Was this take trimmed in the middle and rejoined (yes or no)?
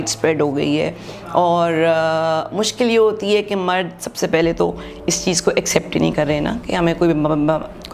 no